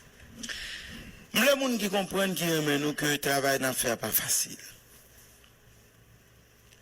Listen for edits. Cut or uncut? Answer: cut